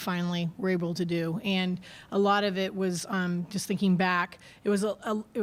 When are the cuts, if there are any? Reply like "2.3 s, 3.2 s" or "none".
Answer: none